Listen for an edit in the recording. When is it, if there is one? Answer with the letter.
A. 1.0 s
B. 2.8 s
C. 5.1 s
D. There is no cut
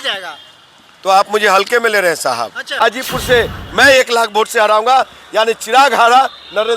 B